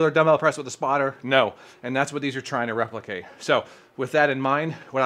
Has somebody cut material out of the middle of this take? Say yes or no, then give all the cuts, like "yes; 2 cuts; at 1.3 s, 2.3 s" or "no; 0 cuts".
no; 0 cuts